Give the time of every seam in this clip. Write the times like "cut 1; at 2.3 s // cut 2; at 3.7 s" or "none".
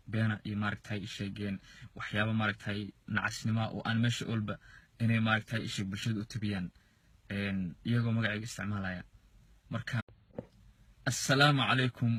none